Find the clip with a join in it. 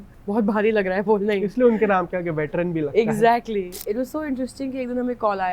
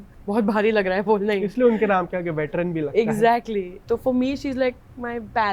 first; 1 cut; at 3.7 s

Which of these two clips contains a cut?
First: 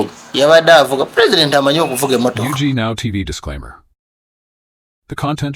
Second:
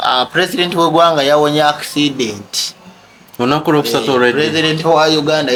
first; 1 cut; at 2.5 s

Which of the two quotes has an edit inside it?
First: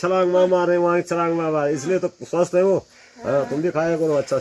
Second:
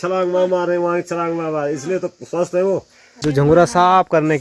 second; 1 cut; at 3.0 s

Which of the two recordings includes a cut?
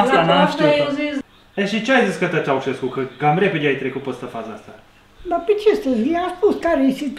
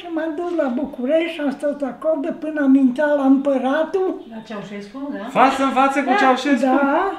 first; 1 cut; at 1.2 s

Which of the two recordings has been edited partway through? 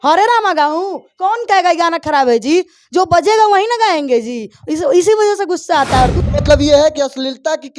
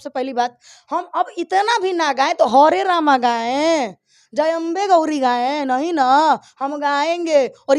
first; 1 cut; at 6.2 s

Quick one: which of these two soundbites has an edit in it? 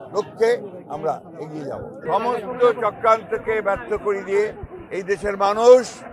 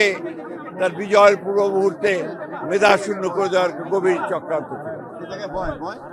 first; 1 cut; at 2.0 s

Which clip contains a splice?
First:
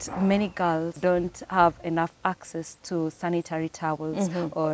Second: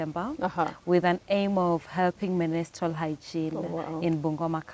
first; 1 cut; at 0.9 s

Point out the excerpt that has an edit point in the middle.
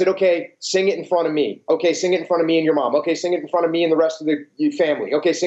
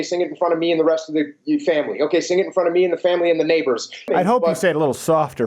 second; 1 cut; at 4.1 s

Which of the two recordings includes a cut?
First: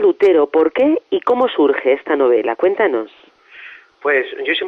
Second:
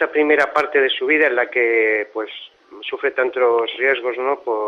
first; 1 cut; at 2.6 s

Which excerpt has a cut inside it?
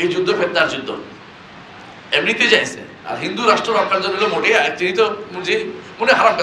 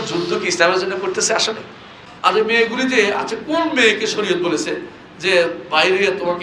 second; 1 cut; at 2.0 s

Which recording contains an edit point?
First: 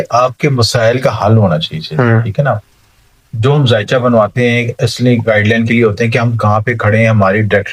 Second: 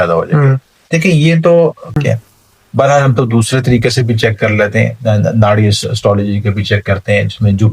second; 1 cut; at 2.0 s

